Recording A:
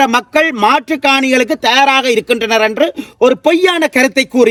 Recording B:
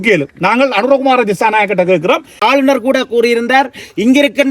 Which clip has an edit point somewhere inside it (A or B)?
B